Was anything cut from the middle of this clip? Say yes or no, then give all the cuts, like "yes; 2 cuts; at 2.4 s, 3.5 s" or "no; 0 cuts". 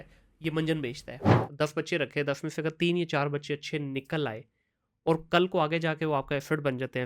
yes; 1 cut; at 1.4 s